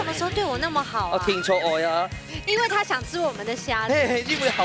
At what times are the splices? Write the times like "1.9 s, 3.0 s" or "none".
none